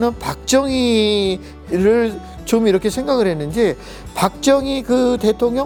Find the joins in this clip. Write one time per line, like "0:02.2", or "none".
none